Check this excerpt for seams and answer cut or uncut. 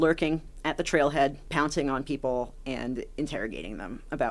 cut